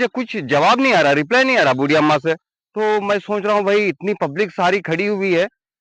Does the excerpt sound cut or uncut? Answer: uncut